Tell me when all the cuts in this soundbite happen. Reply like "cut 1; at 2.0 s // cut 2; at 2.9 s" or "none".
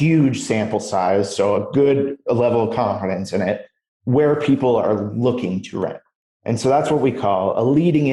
none